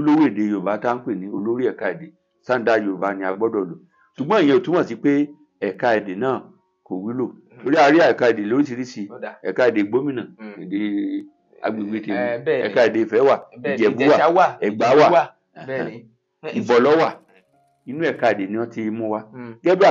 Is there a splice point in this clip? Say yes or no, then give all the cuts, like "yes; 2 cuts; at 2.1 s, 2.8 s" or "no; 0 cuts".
yes; 1 cut; at 17.6 s